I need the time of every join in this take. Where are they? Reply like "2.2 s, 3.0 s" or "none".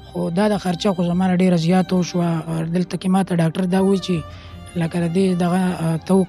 2.5 s